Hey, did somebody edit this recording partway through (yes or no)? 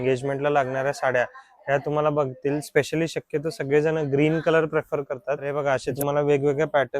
yes